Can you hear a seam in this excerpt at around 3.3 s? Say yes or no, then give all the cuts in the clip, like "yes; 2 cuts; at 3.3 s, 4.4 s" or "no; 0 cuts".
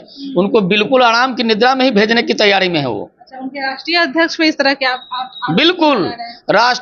no; 0 cuts